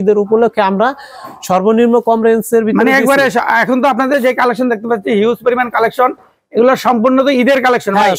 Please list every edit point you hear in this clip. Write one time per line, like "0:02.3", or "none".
none